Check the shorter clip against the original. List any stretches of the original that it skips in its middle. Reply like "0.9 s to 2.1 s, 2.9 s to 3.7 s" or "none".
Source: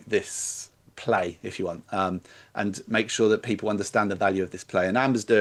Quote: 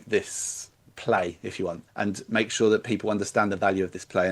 1.8 s to 2.4 s